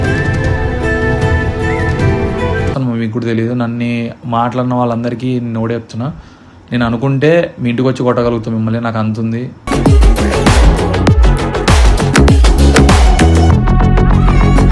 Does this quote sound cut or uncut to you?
cut